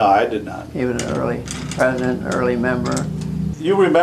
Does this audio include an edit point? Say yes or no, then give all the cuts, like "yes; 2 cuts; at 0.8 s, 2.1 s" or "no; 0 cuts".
yes; 1 cut; at 2.8 s